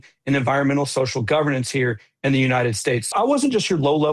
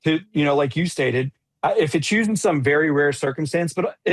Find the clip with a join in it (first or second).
first